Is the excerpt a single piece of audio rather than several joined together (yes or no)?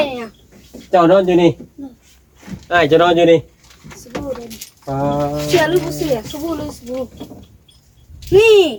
yes